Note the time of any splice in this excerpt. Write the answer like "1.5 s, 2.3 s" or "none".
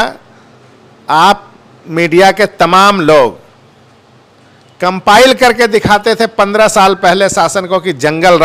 none

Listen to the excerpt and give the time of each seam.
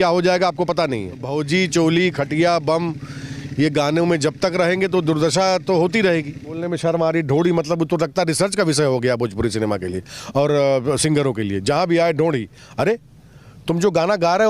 1.2 s, 6.6 s

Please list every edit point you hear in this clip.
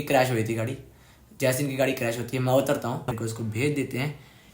3.2 s

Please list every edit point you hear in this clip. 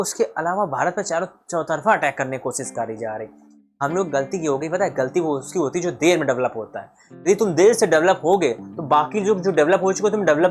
none

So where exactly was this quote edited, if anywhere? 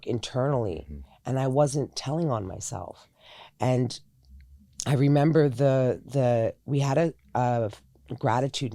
none

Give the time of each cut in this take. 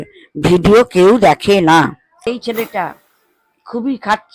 2.1 s

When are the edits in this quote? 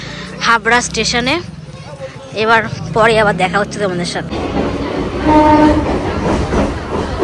4.3 s

